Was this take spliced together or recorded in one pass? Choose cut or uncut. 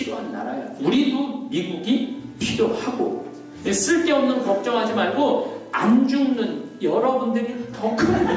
cut